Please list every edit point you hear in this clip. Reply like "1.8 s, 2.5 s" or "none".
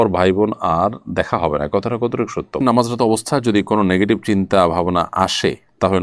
2.6 s